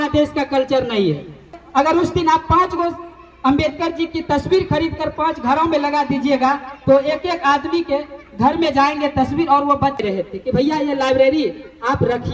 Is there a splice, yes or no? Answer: yes